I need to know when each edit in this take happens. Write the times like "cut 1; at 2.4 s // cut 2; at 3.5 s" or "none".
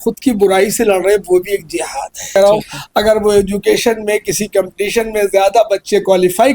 cut 1; at 2.4 s